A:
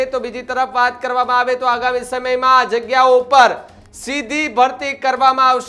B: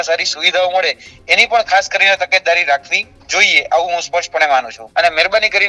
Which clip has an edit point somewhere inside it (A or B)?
B